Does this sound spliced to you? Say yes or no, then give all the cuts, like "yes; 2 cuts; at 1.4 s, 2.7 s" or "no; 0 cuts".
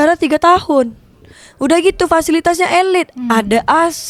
no; 0 cuts